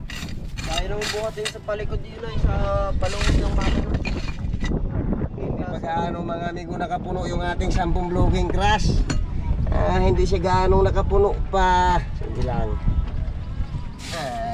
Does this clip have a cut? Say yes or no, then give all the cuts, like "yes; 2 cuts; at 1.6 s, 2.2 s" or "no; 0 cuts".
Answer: no; 0 cuts